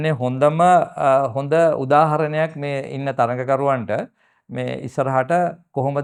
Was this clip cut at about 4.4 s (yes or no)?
no